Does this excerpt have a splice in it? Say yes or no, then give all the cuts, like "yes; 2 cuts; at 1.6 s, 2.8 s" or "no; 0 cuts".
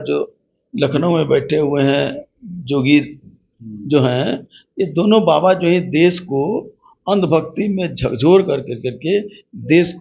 no; 0 cuts